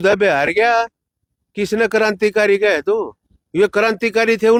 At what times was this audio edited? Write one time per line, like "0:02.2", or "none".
none